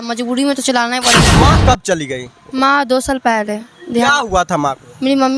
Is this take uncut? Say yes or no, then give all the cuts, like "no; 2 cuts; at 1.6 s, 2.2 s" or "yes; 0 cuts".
no; 1 cut; at 1.2 s